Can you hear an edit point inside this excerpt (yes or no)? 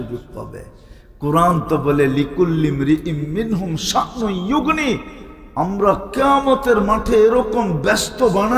no